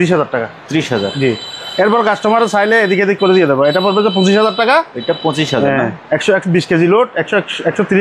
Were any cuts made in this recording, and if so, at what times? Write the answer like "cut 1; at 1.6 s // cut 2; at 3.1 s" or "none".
none